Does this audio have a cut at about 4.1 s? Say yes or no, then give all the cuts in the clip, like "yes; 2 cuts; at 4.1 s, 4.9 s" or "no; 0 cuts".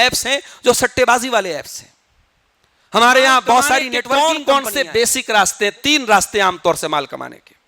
yes; 1 cut; at 4.1 s